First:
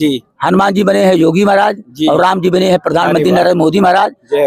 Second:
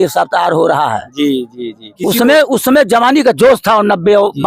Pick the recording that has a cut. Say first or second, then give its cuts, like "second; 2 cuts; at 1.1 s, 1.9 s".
second; 1 cut; at 1.9 s